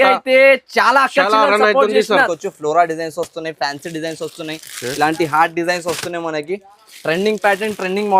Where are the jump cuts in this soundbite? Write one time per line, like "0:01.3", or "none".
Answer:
0:02.3